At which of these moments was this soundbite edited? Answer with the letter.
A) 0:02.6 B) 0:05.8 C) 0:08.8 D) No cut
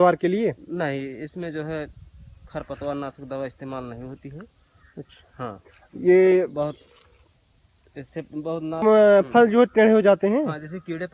C